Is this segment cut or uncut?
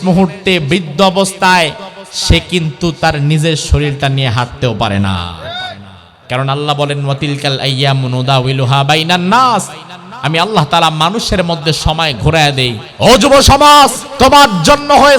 cut